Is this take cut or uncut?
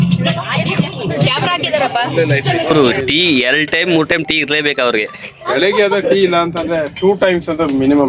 cut